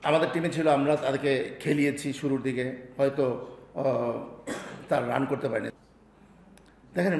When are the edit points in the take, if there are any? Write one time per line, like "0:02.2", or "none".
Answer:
0:05.7